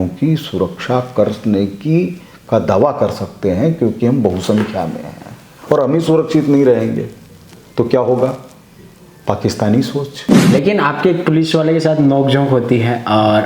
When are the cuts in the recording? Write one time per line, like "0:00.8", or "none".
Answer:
0:10.3